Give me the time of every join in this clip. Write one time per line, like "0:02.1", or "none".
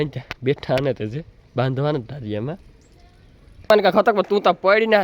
0:03.7